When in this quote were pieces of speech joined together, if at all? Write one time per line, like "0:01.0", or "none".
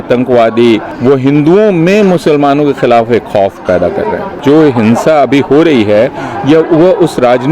0:00.9
0:04.4